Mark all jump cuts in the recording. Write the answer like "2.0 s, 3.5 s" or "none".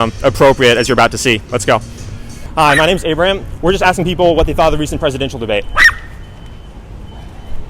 2.3 s